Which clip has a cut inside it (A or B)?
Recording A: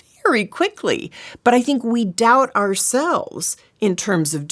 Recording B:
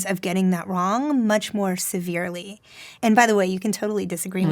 B